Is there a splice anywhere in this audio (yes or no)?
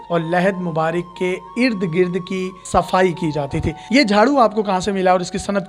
no